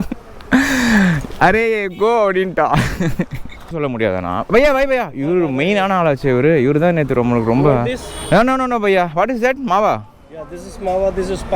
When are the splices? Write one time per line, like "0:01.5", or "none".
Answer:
0:03.7

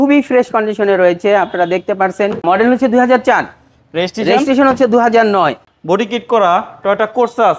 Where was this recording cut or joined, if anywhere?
0:02.4
0:05.7

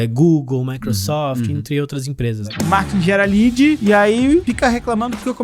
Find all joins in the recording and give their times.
0:02.4
0:03.8
0:04.4

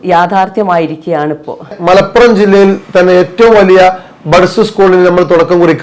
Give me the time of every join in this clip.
0:01.8

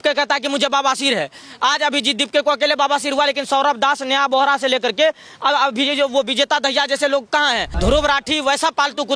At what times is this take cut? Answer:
0:07.7

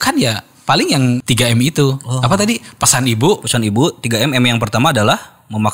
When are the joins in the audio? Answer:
0:01.2

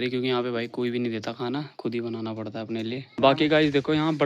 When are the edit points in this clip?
0:03.1

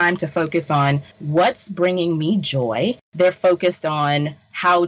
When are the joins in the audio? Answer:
0:01.1
0:03.0

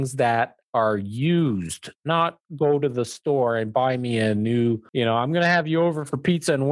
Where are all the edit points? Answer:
0:04.9

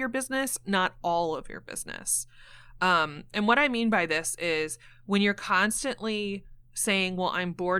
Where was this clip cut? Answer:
none

